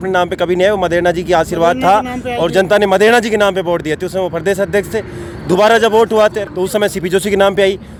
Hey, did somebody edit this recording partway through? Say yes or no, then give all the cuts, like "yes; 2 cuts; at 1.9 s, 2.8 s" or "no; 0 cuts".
no; 0 cuts